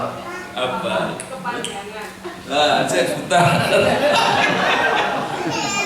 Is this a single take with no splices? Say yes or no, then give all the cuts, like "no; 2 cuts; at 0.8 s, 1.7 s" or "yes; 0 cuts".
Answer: yes; 0 cuts